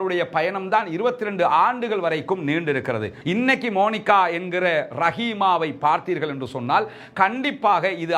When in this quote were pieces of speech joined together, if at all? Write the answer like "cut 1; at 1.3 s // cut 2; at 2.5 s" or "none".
cut 1; at 3.1 s

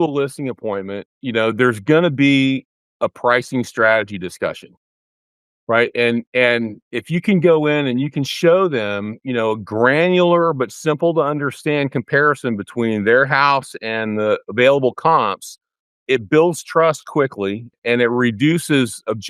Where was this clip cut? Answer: none

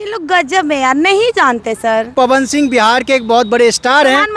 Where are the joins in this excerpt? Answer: cut 1; at 2.1 s

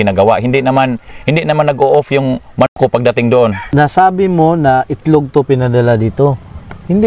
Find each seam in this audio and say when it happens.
cut 1; at 3.6 s

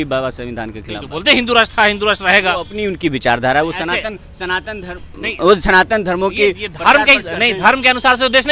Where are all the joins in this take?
none

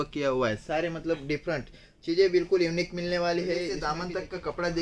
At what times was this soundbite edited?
cut 1; at 3.9 s

